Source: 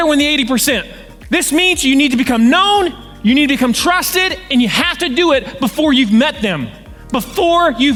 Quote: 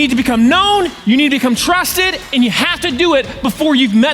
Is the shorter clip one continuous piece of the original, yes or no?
no